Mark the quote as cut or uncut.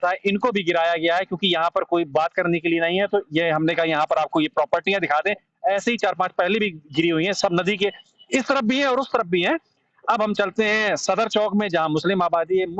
uncut